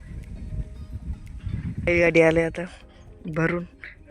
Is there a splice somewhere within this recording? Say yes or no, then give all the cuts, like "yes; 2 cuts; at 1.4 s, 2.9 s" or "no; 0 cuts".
yes; 1 cut; at 1.9 s